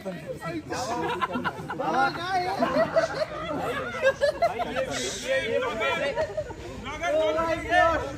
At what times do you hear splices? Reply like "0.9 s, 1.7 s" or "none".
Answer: none